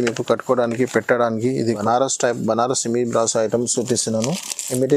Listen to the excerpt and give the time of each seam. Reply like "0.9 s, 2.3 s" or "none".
1.8 s